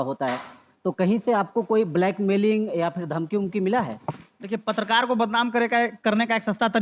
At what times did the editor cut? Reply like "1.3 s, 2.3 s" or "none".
none